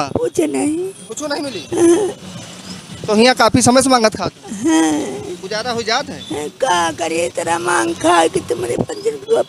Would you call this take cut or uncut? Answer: uncut